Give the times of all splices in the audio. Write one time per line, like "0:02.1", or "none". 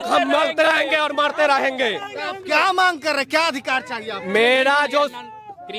none